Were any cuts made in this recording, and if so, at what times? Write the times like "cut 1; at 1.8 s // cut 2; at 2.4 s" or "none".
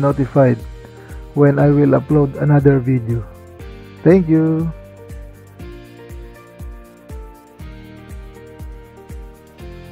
cut 1; at 4.8 s